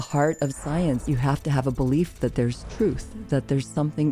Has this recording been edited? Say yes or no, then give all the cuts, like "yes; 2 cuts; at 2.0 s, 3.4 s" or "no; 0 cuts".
yes; 1 cut; at 1.0 s